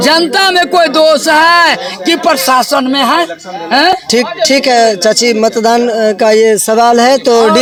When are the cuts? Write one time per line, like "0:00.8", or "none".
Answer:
none